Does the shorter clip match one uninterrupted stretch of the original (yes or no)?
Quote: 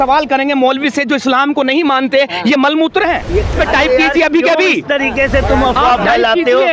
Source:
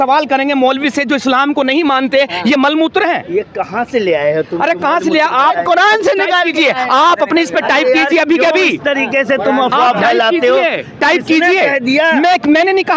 no